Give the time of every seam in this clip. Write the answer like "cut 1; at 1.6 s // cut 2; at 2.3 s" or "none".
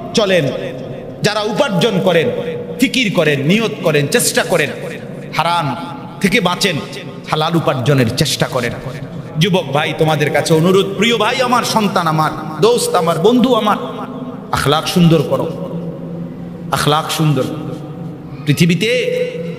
none

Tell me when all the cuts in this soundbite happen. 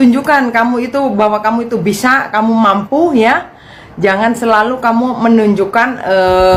none

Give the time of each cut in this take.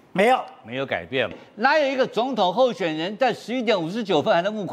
cut 1; at 1.4 s

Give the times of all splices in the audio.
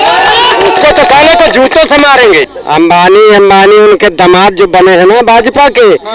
cut 1; at 2.5 s

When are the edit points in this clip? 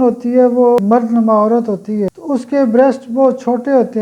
cut 1; at 0.8 s // cut 2; at 2.2 s

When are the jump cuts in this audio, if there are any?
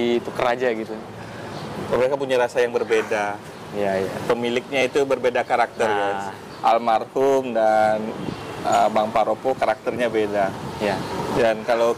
none

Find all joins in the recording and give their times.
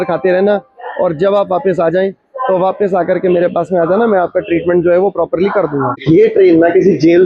cut 1; at 6.0 s

